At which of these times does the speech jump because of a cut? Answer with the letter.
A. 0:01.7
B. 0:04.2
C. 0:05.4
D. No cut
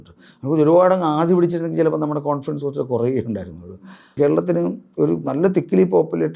B